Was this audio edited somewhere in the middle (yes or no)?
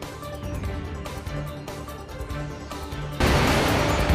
yes